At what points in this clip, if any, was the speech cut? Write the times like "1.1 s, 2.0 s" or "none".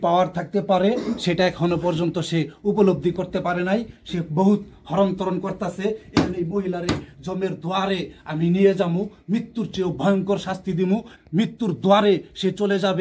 none